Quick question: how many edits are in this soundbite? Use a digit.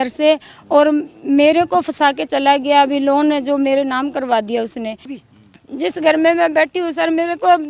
1